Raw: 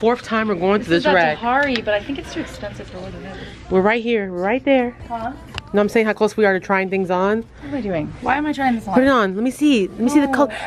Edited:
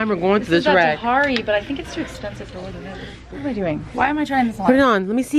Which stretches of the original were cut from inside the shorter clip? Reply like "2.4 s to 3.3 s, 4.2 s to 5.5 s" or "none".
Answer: 3.6 s to 7.5 s